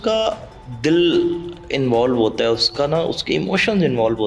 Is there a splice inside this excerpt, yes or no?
no